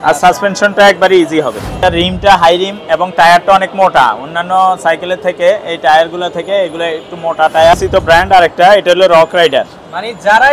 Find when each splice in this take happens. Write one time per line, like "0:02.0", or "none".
0:01.8
0:07.7